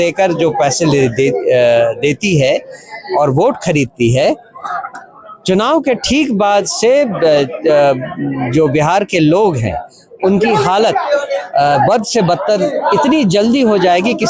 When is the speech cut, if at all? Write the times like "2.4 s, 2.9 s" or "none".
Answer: none